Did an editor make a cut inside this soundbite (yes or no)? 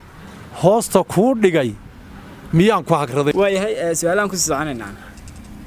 yes